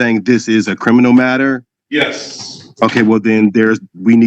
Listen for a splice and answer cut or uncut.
cut